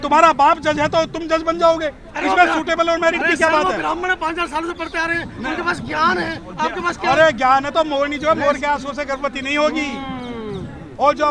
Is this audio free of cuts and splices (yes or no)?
yes